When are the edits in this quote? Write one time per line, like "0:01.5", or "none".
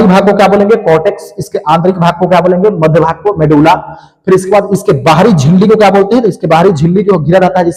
none

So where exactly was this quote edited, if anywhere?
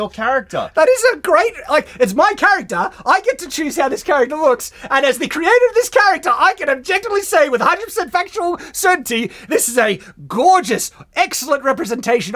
none

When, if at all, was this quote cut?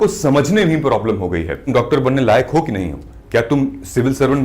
0:01.6

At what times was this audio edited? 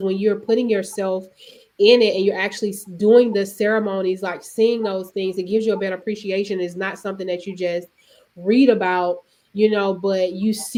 none

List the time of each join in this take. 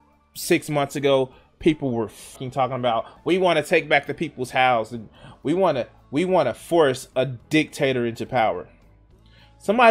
0:02.4

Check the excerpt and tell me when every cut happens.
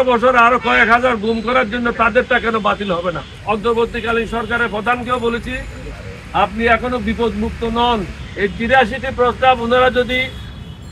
0:03.3
0:08.2

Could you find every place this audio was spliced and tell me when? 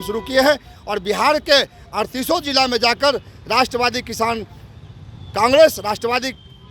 none

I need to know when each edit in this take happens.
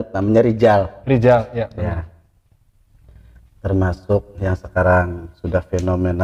none

